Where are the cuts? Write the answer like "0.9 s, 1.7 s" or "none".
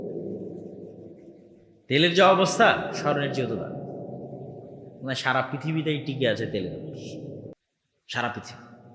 7.5 s